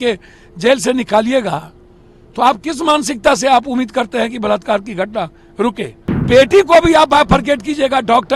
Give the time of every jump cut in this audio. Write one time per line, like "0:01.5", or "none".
0:06.2